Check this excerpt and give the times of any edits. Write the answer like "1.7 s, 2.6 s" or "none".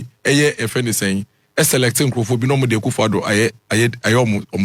none